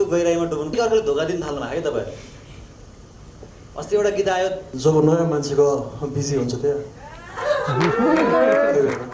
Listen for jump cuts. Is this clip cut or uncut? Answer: cut